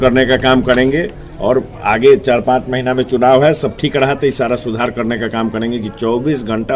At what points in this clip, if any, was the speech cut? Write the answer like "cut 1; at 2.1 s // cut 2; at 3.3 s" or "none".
none